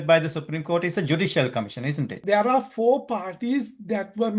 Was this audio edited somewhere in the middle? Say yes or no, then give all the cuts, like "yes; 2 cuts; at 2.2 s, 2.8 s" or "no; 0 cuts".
yes; 1 cut; at 2.2 s